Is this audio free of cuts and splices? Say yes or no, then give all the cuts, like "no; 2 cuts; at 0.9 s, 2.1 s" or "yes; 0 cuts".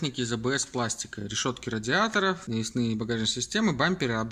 no; 1 cut; at 2.4 s